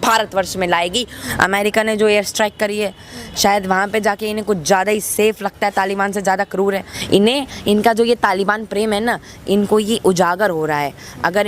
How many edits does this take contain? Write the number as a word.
two